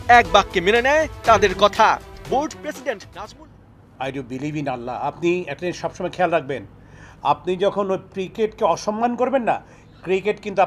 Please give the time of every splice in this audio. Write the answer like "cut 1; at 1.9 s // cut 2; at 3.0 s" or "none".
cut 1; at 3.1 s